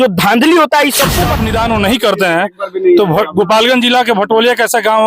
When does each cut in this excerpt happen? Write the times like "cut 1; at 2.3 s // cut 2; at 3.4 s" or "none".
cut 1; at 1.2 s